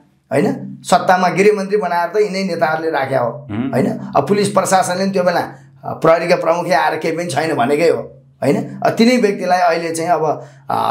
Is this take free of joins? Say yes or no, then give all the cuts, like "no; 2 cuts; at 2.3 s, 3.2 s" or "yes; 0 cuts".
yes; 0 cuts